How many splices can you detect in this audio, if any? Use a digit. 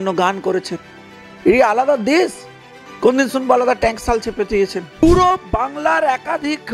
1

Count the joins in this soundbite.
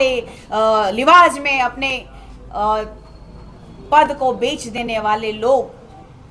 0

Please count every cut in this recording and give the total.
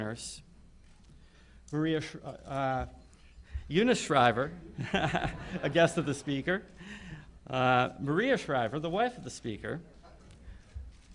1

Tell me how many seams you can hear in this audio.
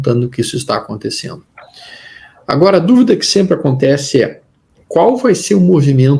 0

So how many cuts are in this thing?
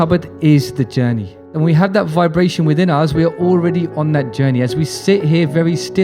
1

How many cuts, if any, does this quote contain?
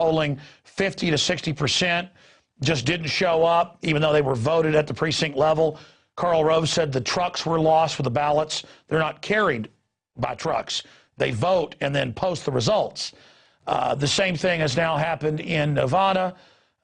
1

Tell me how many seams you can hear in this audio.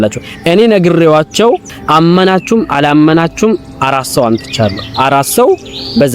1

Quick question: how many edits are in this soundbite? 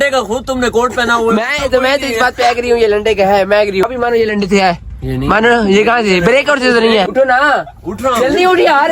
2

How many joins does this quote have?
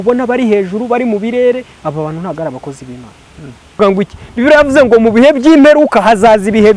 1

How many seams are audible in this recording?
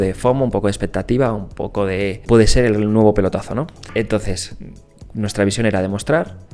2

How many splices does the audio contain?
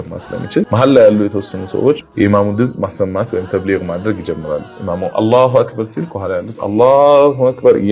1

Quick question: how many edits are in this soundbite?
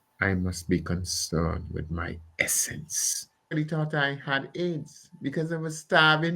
1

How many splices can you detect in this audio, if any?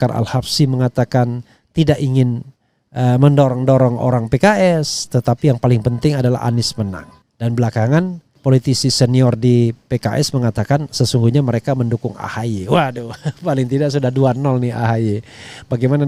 0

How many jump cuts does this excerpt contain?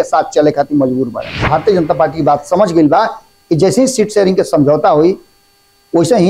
1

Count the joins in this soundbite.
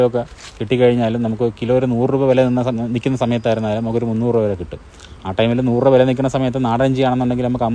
0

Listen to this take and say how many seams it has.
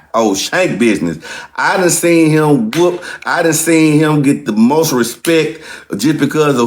0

